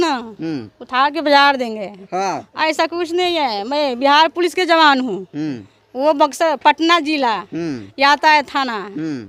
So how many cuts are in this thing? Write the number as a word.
zero